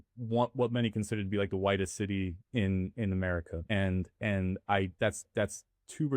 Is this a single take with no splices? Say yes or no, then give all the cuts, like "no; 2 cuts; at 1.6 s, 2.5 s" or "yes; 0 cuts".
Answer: no; 2 cuts; at 3.6 s, 4.9 s